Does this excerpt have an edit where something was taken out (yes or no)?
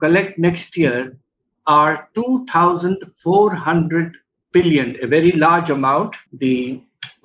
yes